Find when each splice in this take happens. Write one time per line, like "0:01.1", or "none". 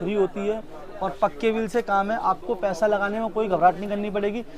none